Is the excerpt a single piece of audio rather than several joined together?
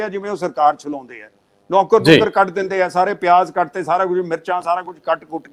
yes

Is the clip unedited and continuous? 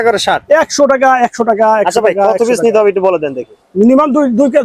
yes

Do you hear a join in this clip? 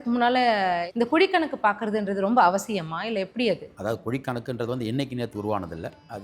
yes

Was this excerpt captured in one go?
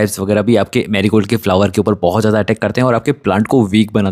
yes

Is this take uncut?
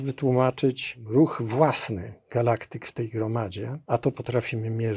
no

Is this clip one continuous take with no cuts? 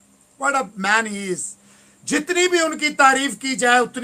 yes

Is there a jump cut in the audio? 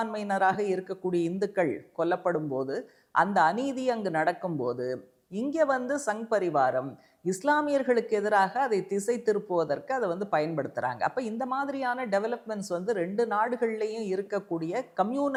no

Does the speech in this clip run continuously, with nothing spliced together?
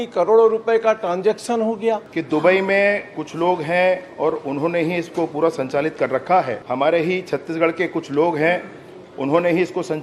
no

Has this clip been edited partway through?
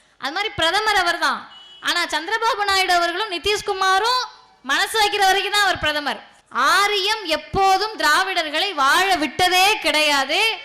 yes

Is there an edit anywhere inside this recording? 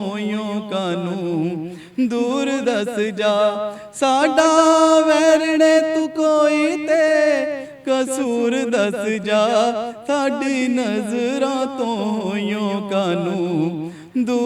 no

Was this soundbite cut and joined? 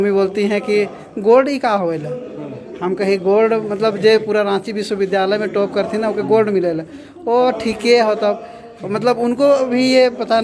no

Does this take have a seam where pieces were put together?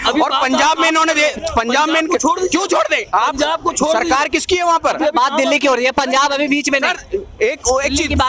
no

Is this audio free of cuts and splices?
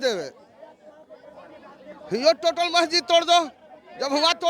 yes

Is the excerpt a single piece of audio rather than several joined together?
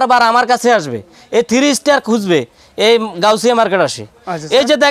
yes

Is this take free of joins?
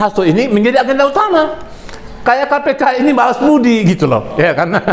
yes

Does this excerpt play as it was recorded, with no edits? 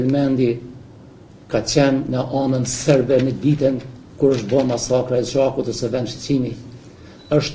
yes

